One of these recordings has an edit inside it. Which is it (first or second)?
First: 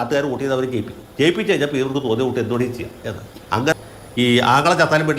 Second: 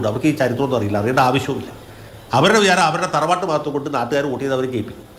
first